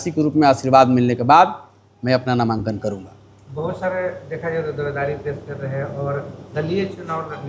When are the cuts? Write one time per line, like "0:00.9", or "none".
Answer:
none